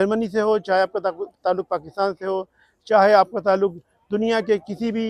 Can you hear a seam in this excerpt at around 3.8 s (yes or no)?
no